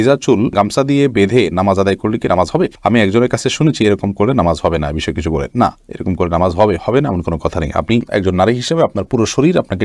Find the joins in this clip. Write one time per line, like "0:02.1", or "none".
none